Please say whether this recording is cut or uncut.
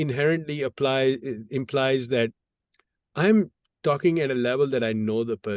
uncut